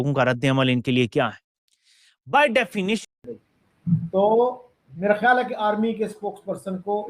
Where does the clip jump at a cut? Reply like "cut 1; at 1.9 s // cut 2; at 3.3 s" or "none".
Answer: cut 1; at 3.0 s